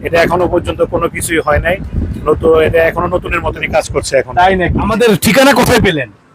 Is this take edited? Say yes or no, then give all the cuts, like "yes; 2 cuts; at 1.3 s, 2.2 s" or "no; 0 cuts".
yes; 1 cut; at 4.9 s